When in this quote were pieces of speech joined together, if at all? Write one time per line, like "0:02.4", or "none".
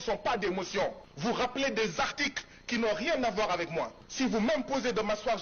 0:01.1
0:04.0